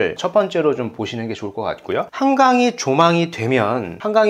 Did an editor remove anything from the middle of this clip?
yes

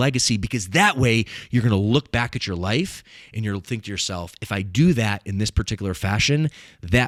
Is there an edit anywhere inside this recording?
no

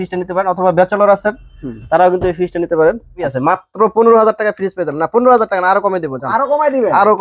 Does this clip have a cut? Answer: yes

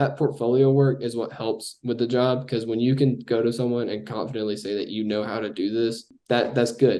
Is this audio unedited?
no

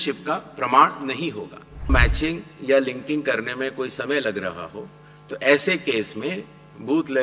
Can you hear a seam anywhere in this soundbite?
yes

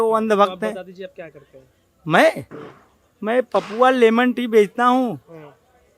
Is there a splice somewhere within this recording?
no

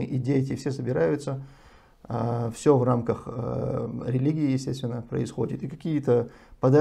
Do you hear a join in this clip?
no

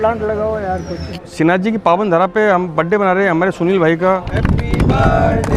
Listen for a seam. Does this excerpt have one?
yes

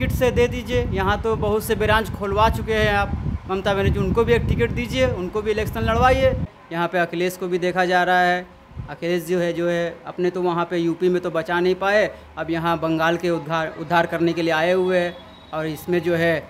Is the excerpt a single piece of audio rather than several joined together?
no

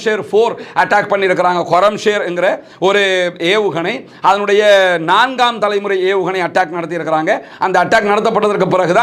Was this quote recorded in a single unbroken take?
yes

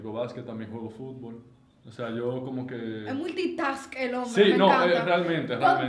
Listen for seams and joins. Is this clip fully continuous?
yes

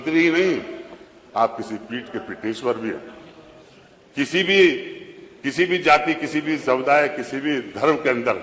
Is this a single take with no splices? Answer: yes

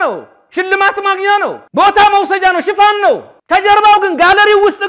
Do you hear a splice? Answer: yes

